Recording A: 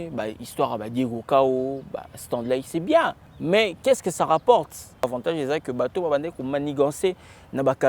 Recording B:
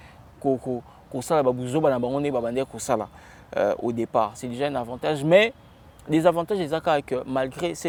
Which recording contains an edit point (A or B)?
A